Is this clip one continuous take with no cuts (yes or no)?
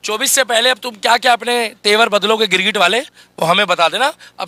yes